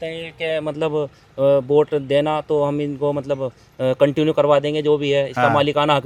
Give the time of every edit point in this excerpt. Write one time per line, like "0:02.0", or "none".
none